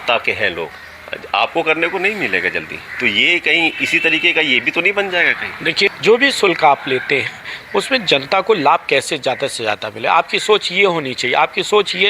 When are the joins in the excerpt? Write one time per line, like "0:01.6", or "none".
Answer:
0:05.9